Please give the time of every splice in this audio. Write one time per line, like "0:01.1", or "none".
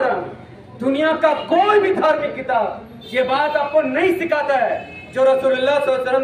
none